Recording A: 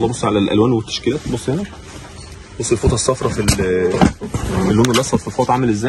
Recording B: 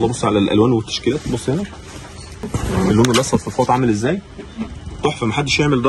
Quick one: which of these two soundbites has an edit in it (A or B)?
B